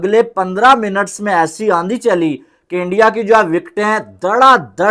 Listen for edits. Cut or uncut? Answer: uncut